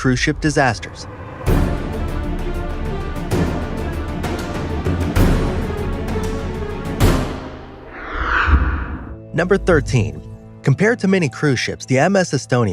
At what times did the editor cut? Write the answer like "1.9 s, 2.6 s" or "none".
9.9 s